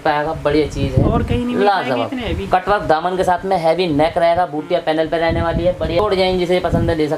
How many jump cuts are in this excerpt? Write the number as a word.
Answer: one